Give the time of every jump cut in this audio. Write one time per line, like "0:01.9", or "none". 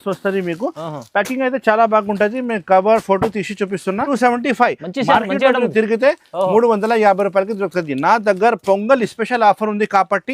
0:04.1